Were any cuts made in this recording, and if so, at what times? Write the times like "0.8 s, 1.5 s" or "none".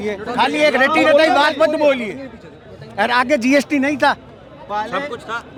none